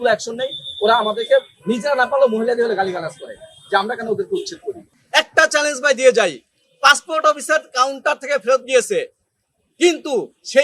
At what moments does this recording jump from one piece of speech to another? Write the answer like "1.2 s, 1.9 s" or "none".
4.9 s

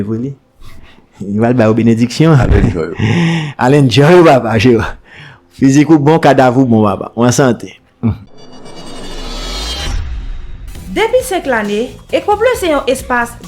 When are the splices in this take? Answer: 8.4 s

